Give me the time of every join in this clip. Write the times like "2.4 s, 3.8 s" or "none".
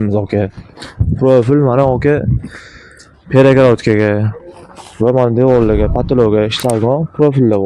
none